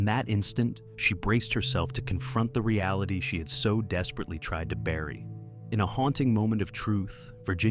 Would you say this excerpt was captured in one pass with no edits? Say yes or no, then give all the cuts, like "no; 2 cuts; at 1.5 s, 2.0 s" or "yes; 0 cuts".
no; 1 cut; at 5.3 s